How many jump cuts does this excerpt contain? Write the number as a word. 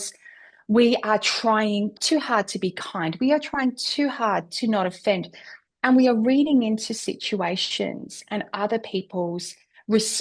one